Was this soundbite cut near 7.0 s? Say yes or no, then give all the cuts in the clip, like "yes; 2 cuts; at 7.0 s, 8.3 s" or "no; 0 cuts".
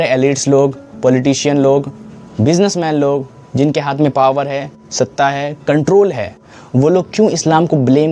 no; 0 cuts